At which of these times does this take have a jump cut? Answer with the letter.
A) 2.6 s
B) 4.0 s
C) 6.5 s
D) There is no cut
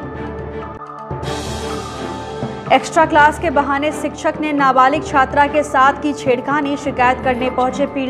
D